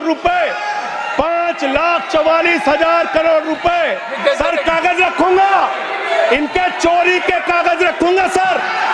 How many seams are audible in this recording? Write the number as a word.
one